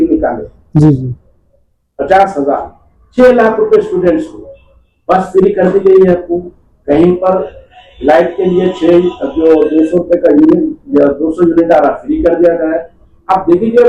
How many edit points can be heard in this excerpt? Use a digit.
0